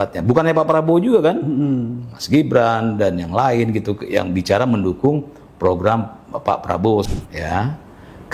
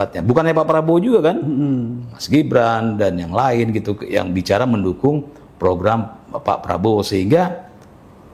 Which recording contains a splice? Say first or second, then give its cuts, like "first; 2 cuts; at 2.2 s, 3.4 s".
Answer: first; 1 cut; at 7.1 s